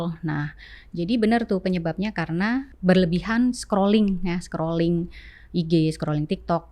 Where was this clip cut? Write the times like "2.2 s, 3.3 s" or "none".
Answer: 2.7 s